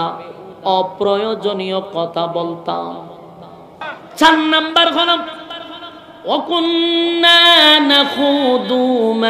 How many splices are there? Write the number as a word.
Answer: one